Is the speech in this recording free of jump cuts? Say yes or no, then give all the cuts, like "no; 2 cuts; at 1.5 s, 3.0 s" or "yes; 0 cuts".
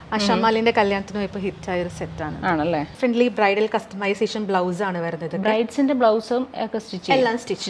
no; 1 cut; at 2.9 s